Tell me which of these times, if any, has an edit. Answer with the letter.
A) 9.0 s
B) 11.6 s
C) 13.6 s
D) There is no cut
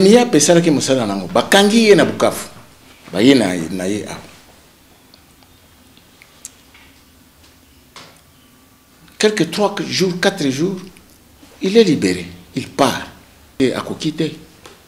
C